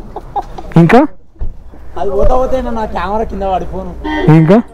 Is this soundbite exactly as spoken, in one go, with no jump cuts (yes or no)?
yes